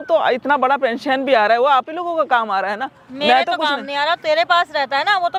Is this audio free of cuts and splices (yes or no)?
yes